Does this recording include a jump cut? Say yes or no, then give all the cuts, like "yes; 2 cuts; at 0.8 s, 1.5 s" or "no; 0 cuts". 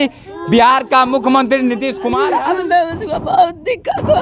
yes; 1 cut; at 2.0 s